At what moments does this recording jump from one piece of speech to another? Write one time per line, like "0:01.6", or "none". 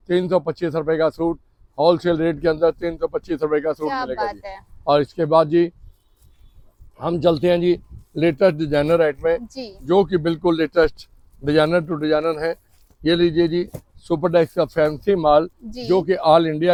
none